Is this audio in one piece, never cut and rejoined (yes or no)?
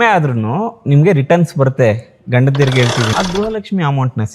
no